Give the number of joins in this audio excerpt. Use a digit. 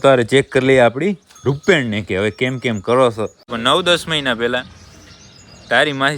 1